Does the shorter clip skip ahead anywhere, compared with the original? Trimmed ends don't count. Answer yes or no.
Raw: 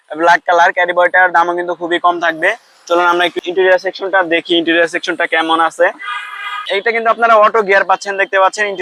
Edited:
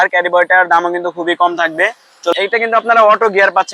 yes